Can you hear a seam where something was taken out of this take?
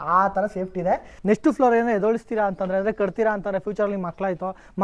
yes; 1 cut; at 1.1 s

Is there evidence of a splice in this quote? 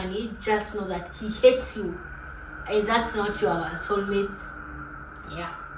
no; 0 cuts

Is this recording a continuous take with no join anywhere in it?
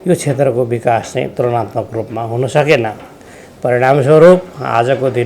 yes; 0 cuts

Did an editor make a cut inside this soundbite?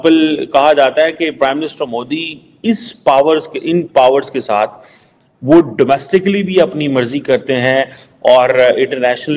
no; 0 cuts

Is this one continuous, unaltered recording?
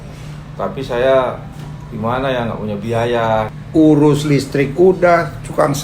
no; 1 cut; at 3.5 s

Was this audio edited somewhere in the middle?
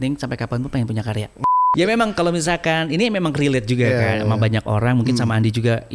yes; 1 cut; at 1.4 s

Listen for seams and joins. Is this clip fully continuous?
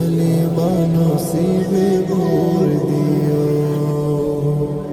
yes; 0 cuts

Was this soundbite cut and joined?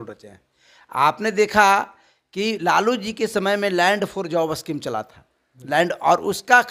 no; 0 cuts

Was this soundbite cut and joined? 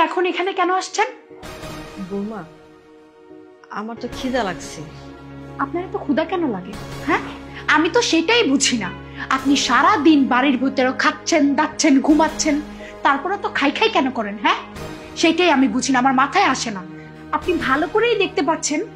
no; 0 cuts

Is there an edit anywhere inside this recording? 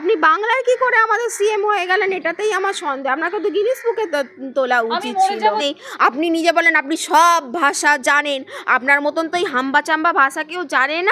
yes; 1 cut; at 5.6 s

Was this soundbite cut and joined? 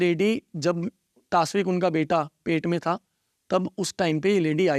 no; 0 cuts

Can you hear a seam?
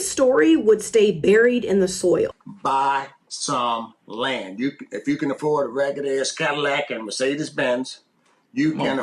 yes; 1 cut; at 2.4 s

